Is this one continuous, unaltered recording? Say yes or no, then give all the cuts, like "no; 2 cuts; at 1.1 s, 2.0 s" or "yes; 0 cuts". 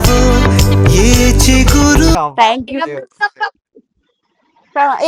yes; 0 cuts